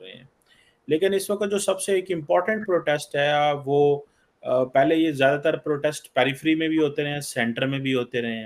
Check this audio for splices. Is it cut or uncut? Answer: uncut